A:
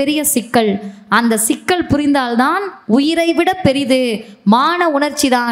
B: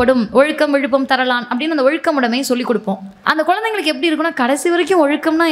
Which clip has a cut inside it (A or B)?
B